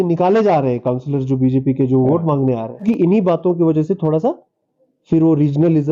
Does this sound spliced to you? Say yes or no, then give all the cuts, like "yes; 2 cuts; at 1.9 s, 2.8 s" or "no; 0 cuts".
yes; 1 cut; at 2.8 s